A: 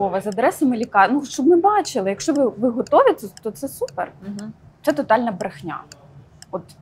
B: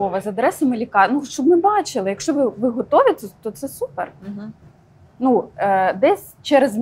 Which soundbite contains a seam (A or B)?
A